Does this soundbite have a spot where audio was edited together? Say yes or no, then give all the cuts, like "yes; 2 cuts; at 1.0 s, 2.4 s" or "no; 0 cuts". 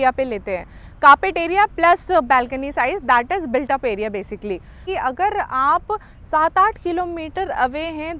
yes; 1 cut; at 4.8 s